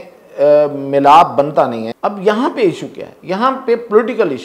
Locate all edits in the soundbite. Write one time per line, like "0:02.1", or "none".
0:01.9